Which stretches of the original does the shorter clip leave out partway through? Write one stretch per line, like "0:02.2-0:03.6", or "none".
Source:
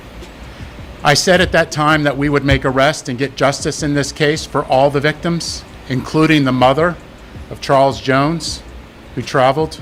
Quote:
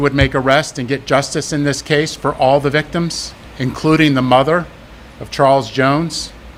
none